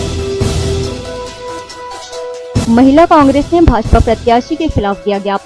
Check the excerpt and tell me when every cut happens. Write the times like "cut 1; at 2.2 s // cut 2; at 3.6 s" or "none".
cut 1; at 1.3 s